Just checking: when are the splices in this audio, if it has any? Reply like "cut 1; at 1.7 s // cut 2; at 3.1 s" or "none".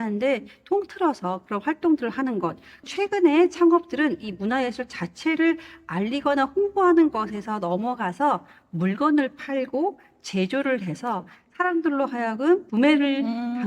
cut 1; at 2.9 s